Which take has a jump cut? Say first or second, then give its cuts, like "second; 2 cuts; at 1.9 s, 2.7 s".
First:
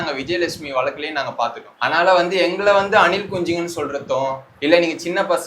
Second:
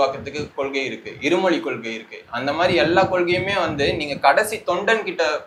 first; 2 cuts; at 1.7 s, 4.5 s